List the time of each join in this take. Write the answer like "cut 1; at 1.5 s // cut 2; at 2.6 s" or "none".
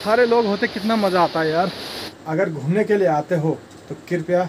cut 1; at 2.2 s